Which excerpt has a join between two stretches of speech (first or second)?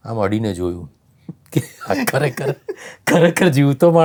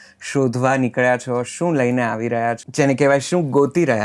second